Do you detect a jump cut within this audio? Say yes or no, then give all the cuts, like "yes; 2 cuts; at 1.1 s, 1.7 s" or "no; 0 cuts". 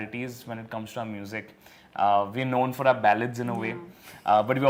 no; 0 cuts